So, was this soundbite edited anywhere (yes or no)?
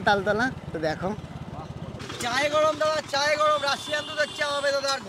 yes